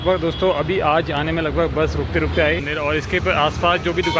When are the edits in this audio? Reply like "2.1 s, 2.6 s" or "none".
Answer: 2.6 s